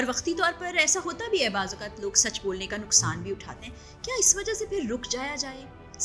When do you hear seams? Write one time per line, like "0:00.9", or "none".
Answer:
none